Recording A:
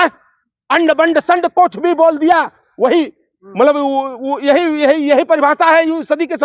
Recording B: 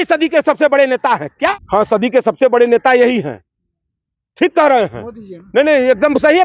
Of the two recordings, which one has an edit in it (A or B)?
B